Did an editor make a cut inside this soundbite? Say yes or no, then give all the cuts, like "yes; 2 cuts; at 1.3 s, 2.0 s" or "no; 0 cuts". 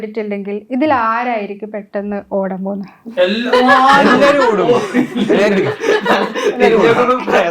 no; 0 cuts